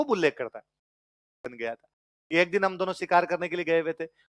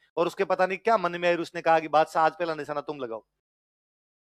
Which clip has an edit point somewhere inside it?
first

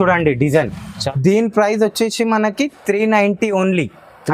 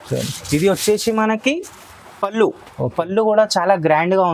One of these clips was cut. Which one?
first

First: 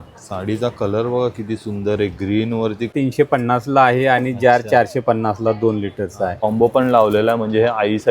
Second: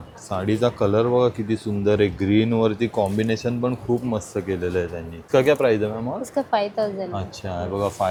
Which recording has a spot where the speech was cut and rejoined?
first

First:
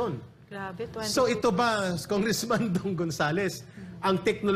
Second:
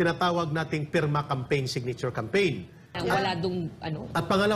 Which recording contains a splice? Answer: second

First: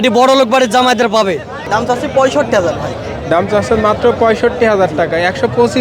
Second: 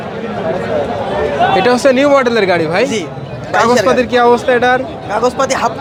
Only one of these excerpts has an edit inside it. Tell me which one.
first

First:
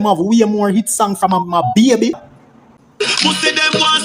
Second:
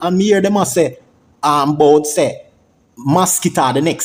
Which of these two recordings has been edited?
first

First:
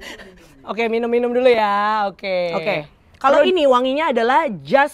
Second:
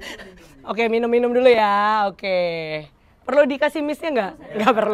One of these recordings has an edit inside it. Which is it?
first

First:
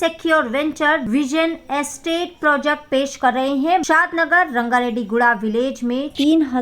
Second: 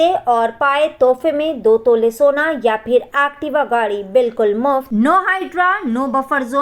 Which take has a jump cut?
first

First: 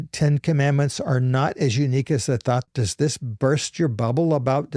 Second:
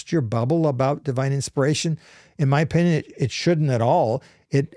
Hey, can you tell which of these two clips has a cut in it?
first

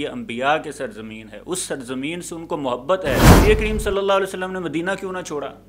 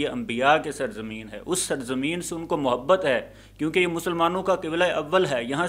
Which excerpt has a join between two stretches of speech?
first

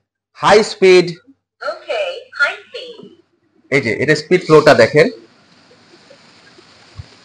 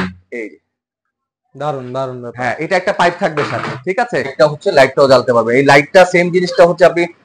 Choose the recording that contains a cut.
second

